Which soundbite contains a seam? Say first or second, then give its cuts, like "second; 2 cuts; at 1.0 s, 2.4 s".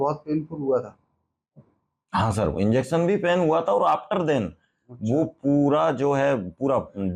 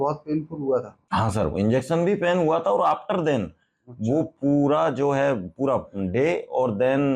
second; 1 cut; at 1.0 s